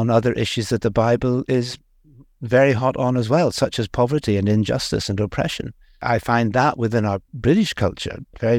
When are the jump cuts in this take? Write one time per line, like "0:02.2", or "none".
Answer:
0:06.0